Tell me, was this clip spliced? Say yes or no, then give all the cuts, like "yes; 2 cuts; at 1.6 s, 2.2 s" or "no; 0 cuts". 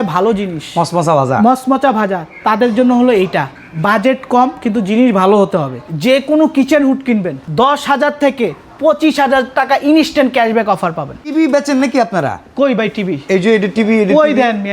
yes; 3 cuts; at 5.8 s, 7.4 s, 11.3 s